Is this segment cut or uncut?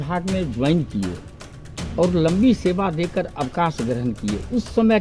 uncut